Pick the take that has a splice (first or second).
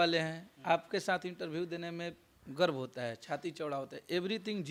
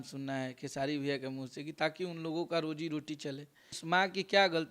second